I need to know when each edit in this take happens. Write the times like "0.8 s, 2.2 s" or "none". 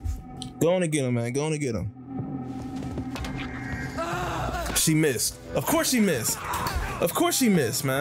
none

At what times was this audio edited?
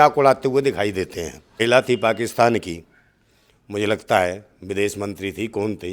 1.6 s

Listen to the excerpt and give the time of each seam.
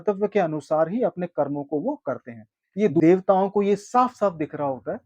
3.0 s

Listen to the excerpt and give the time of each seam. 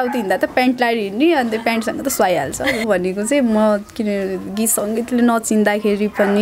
2.8 s

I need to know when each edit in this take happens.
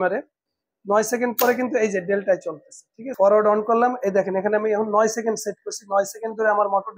3.1 s

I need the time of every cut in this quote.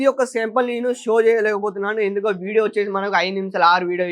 none

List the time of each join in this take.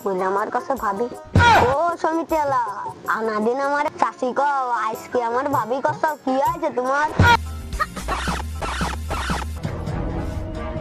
7.4 s

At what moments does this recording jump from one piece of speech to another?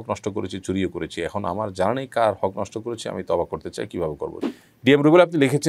4.4 s

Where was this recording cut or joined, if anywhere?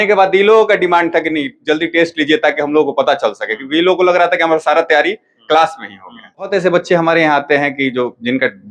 6.5 s

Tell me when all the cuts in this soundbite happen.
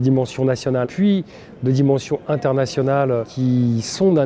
0.9 s, 3.3 s

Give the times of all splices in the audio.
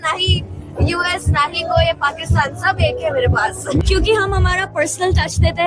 3.8 s

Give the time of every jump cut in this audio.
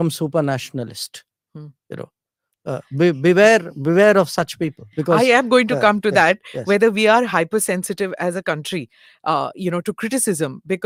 none

